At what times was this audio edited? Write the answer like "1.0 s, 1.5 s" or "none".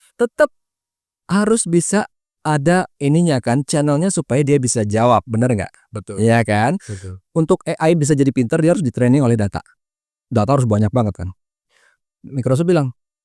7.1 s